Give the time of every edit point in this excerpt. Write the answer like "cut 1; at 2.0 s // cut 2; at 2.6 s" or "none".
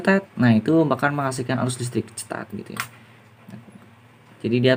none